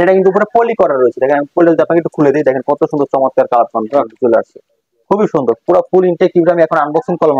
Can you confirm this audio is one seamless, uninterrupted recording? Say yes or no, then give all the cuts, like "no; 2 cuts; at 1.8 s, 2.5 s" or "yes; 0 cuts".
yes; 0 cuts